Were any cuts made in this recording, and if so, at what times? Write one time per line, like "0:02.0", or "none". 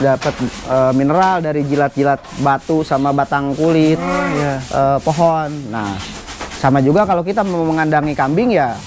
none